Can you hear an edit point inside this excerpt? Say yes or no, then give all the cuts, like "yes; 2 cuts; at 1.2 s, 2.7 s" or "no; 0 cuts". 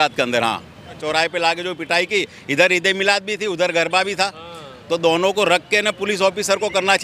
yes; 1 cut; at 1.0 s